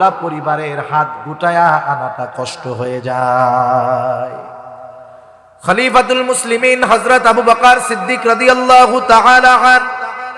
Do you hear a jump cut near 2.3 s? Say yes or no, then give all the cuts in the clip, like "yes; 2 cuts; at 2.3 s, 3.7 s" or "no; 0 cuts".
no; 1 cut; at 5.0 s